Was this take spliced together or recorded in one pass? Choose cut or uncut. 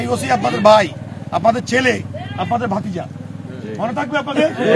uncut